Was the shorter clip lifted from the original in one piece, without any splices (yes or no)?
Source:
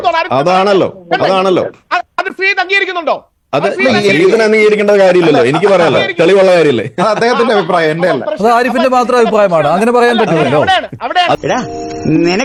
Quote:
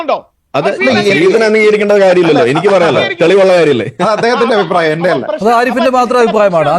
yes